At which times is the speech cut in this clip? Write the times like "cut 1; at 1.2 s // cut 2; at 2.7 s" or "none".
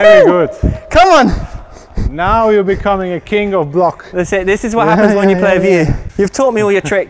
cut 1; at 6.0 s